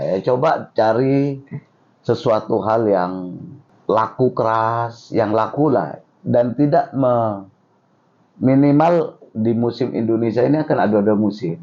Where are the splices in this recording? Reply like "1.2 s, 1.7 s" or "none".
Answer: 3.7 s